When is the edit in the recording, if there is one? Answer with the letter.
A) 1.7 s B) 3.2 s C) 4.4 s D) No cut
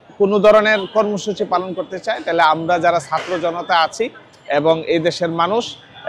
D